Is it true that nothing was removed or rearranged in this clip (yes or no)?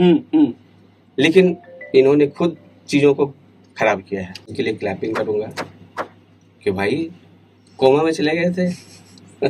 no